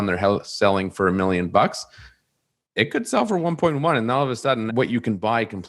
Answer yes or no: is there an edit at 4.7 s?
yes